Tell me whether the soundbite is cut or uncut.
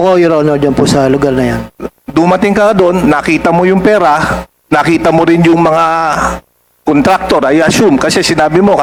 uncut